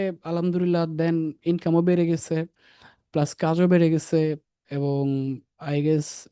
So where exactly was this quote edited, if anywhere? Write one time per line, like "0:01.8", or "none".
none